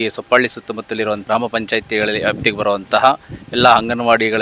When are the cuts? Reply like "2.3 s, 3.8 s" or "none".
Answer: 1.2 s

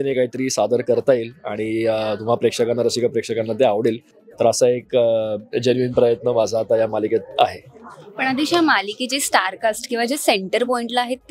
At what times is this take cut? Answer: none

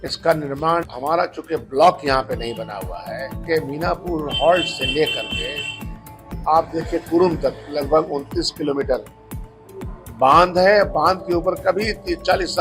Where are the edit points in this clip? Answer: 0.9 s, 3.4 s

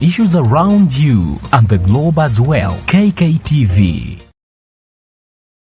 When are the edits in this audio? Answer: none

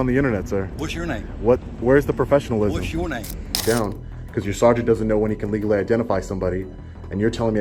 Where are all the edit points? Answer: 3.6 s

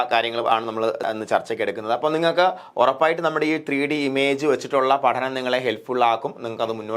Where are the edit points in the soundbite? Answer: 1.1 s

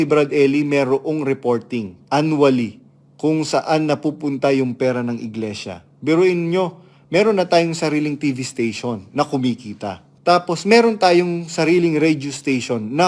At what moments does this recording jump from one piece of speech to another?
1.9 s, 10.1 s

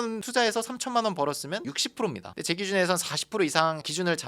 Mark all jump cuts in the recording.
2.2 s

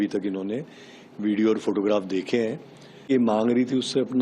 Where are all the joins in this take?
3.1 s

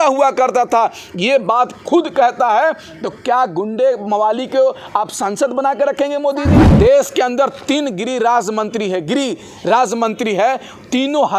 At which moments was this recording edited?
6.7 s

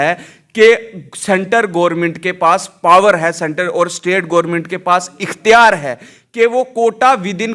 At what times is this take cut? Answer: none

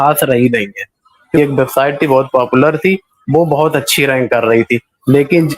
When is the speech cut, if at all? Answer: 1.4 s

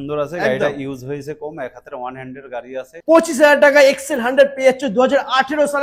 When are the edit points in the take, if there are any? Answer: 2.9 s

